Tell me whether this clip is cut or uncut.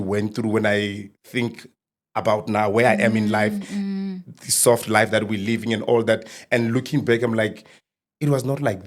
uncut